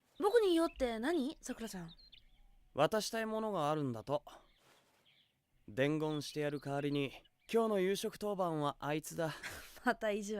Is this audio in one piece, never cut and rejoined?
no; 4 cuts; at 1.6 s, 4.4 s, 6.5 s, 9.4 s

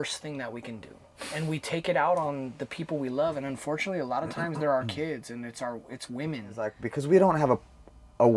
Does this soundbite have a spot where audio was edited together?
yes; 1 cut; at 6.9 s

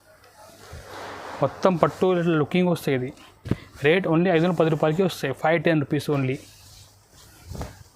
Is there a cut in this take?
no; 0 cuts

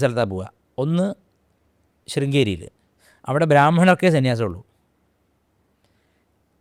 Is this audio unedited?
yes; 0 cuts

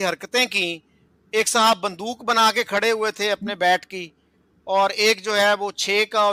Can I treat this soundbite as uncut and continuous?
yes; 0 cuts

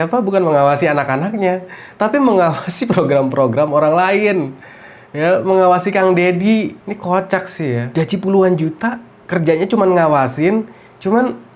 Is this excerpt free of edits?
yes; 0 cuts

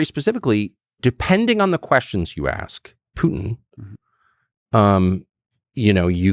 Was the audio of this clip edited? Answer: yes; 1 cut; at 1.0 s

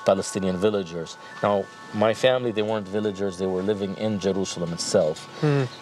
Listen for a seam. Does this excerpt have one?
no; 0 cuts

